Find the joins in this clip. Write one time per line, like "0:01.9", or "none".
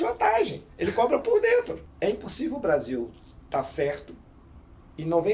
0:01.8

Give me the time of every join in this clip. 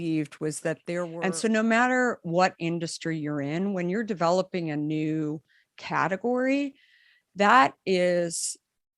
0:01.1

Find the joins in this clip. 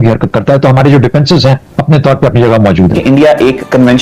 0:03.0

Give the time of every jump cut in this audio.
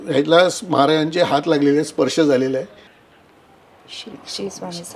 0:03.0

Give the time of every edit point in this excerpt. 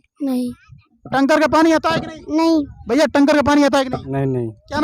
0:02.8

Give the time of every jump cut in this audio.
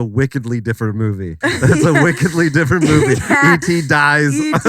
0:01.3

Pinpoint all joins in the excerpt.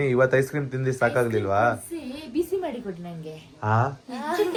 none

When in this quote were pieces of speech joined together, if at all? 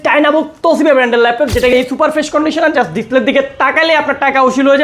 0:01.7

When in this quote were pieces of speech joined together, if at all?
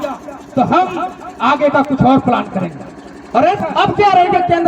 0:03.6

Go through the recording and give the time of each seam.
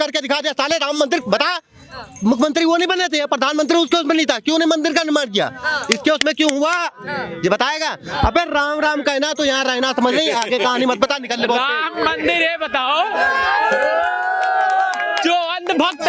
none

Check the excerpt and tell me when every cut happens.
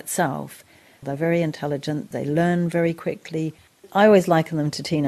0:01.0
0:02.1
0:03.8

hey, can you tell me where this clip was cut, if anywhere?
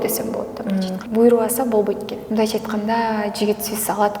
0:01.0
0:02.2

